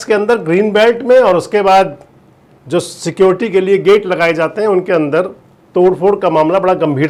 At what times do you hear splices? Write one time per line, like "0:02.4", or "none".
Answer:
none